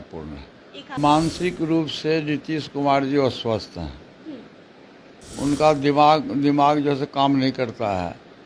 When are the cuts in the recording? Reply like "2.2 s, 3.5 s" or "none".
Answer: 1.0 s